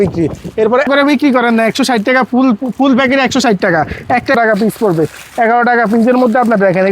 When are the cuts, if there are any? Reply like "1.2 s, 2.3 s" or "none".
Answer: 0.9 s, 4.3 s